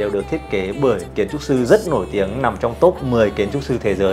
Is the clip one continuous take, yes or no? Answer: yes